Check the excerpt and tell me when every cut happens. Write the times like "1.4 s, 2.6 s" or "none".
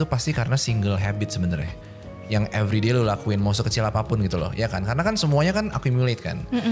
none